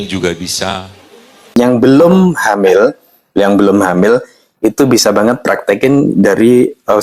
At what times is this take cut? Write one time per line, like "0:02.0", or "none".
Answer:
0:01.5